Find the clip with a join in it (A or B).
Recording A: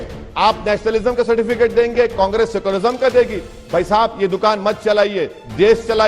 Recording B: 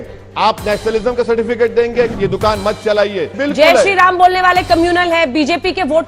B